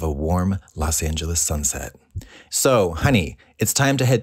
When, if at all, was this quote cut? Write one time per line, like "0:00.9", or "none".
0:02.4